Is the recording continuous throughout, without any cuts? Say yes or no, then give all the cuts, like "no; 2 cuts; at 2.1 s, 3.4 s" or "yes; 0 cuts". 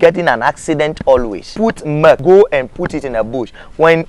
no; 1 cut; at 1.9 s